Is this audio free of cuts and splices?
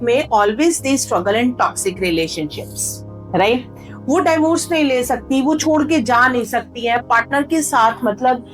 yes; 0 cuts

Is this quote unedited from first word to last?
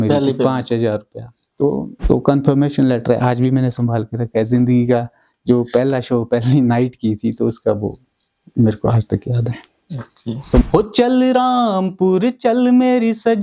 no; 2 cuts; at 1.9 s, 10.6 s

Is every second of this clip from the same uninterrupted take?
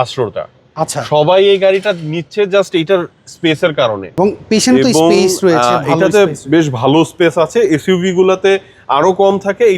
no; 1 cut; at 4.1 s

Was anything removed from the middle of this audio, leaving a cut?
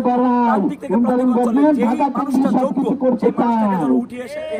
no; 0 cuts

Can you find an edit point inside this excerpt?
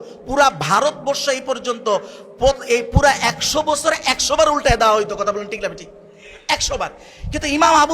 no; 0 cuts

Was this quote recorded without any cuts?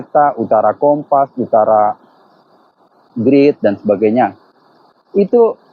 yes; 0 cuts

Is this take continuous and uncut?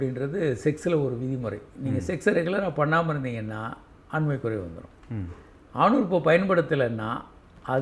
yes; 0 cuts

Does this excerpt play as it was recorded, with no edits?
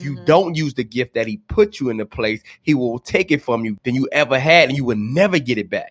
no; 1 cut; at 3.8 s

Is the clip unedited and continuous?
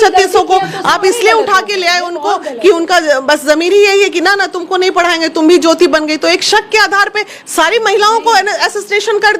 yes; 0 cuts

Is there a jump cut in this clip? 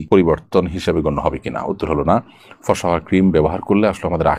no; 0 cuts

